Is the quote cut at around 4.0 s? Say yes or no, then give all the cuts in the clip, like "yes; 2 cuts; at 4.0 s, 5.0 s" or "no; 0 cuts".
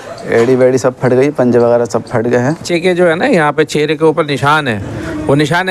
no; 1 cut; at 2.7 s